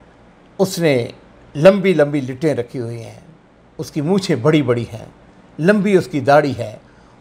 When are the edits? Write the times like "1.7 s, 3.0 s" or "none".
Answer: none